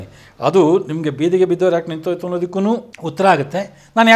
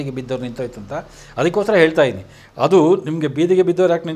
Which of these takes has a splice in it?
first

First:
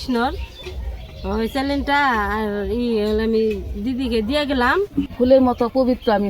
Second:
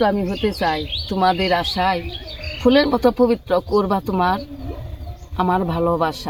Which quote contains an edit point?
first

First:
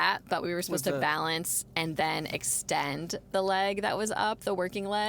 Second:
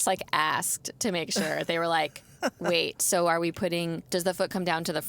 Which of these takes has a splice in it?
second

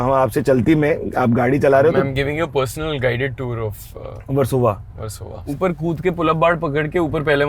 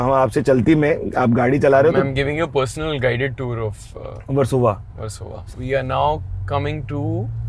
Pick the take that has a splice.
first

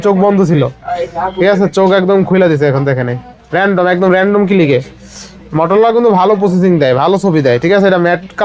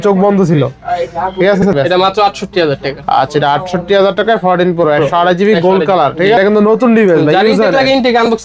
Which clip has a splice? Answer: second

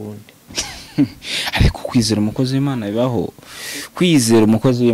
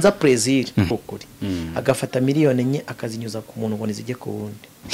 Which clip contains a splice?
second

